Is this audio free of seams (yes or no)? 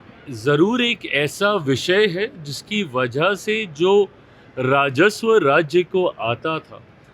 yes